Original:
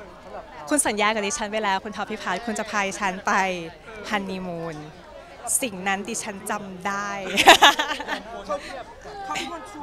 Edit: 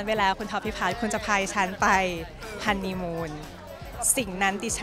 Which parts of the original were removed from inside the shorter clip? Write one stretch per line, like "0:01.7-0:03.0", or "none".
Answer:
none